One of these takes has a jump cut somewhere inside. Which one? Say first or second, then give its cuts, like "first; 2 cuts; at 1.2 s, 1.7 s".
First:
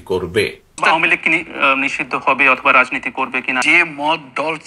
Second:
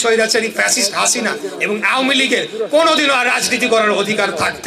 first; 2 cuts; at 0.8 s, 3.6 s